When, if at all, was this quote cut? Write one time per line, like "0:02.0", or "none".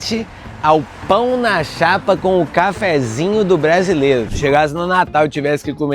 0:04.3